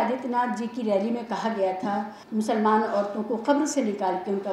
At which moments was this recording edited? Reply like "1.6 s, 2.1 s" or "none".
2.2 s